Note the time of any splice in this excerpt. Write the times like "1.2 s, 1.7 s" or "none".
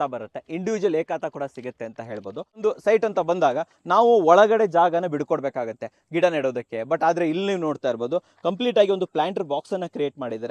2.6 s